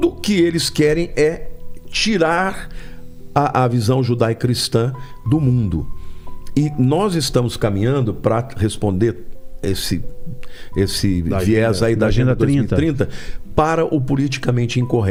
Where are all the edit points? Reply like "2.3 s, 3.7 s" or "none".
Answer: none